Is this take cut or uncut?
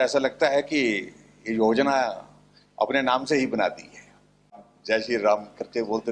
cut